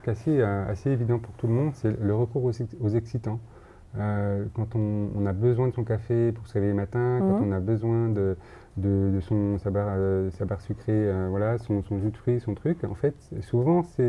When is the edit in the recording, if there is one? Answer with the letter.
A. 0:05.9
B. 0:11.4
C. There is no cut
C